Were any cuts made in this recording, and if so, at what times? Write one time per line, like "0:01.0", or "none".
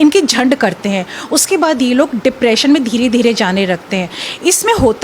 none